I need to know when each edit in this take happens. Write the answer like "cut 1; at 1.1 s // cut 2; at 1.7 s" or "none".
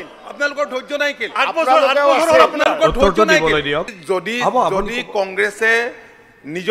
cut 1; at 4.0 s